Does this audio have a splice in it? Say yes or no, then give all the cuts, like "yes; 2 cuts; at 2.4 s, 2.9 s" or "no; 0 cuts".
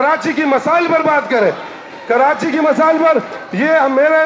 no; 0 cuts